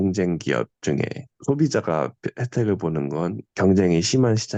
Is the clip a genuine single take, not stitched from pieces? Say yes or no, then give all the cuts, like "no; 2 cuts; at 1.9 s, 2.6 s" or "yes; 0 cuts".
yes; 0 cuts